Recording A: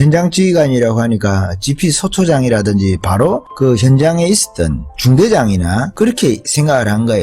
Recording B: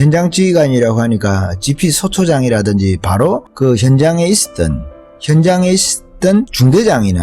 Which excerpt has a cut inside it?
A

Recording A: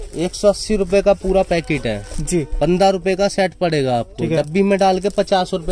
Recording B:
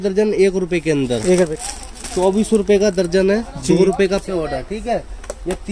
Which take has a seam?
B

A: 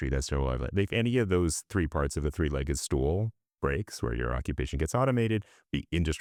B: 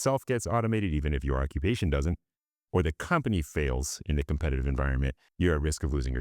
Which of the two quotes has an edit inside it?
B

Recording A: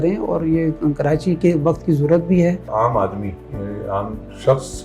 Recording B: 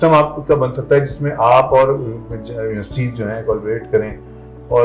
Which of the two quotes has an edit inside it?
A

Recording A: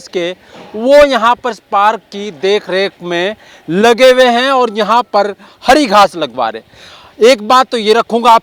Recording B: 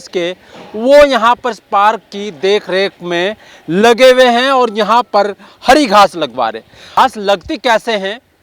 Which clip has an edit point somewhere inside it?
B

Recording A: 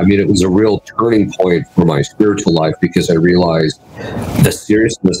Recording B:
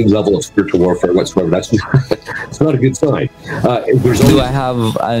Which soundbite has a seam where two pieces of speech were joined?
B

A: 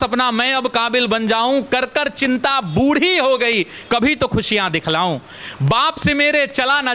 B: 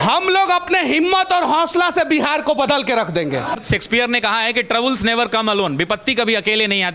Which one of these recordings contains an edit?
B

